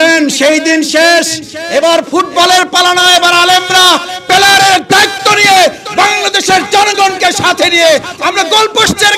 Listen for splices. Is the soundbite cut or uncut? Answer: uncut